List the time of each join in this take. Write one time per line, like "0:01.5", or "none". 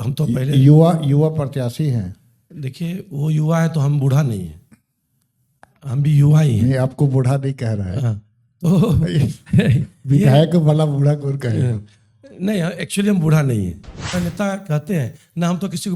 0:14.1